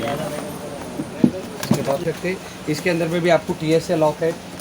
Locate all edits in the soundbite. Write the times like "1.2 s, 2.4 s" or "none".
2.0 s